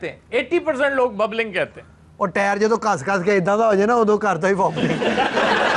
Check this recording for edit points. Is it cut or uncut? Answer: uncut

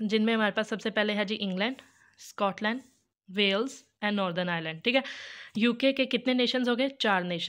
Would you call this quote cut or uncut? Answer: uncut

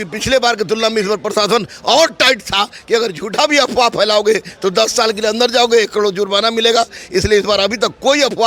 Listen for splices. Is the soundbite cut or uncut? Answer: uncut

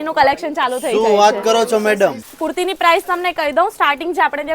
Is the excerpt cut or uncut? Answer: cut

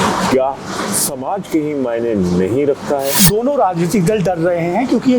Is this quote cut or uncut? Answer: cut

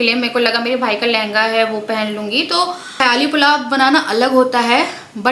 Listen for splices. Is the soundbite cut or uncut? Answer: cut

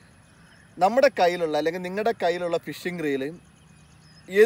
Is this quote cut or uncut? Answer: uncut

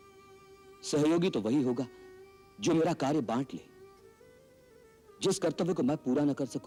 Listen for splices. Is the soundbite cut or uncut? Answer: uncut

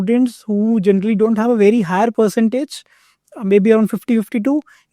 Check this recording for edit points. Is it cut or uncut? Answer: uncut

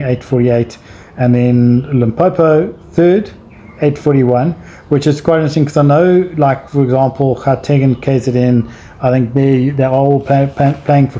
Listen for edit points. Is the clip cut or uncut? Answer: uncut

